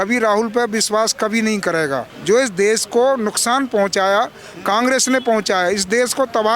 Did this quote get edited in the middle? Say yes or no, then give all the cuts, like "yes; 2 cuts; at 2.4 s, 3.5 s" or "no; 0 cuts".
yes; 1 cut; at 2.1 s